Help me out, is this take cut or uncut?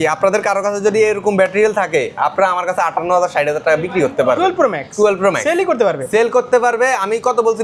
uncut